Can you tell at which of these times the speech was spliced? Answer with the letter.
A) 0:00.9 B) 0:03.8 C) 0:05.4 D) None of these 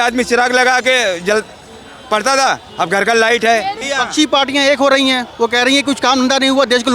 B